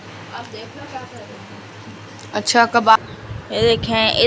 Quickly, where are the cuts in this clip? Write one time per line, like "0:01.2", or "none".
0:03.0